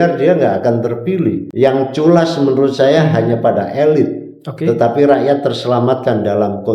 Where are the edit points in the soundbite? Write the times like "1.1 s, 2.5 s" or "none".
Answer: 1.5 s